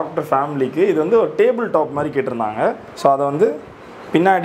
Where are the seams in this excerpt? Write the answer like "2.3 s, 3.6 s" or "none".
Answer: none